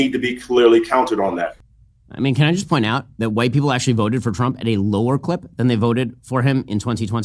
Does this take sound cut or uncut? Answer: cut